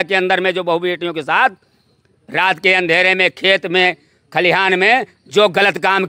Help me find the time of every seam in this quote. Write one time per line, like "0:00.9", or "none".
none